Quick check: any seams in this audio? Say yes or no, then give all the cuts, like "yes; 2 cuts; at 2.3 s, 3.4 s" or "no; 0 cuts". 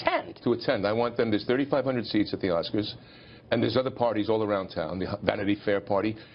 yes; 1 cut; at 1.1 s